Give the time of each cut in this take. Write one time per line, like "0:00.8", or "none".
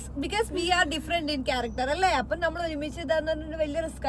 none